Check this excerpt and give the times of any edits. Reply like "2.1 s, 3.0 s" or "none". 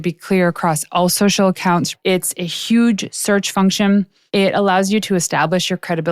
1.9 s, 4.2 s